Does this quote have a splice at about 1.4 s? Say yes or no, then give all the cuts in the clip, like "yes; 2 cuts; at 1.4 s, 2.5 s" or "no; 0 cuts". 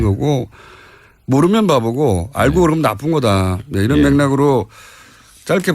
yes; 1 cut; at 1.4 s